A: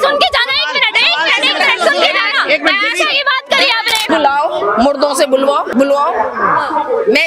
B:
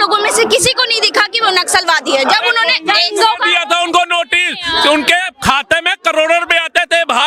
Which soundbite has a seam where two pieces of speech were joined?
A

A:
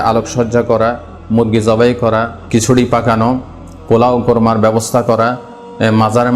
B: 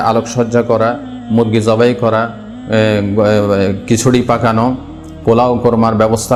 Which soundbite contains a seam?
A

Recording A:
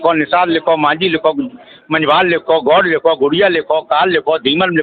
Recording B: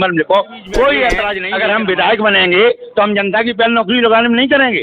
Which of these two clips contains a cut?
B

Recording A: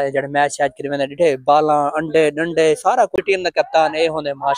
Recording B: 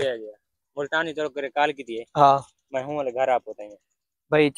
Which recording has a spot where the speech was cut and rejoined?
A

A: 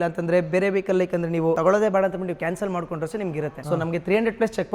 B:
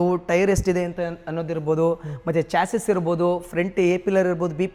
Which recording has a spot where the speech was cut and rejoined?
A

